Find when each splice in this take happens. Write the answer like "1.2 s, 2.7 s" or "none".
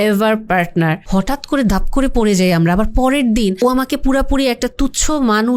1.0 s, 3.6 s